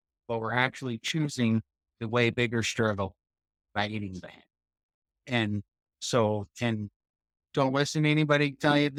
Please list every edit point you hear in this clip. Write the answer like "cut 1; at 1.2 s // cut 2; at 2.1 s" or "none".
none